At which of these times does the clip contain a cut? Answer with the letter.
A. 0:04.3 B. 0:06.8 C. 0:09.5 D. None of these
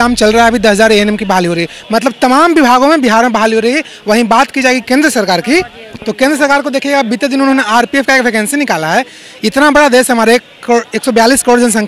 D